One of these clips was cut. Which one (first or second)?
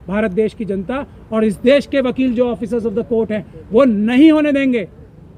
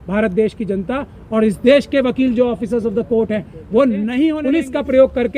second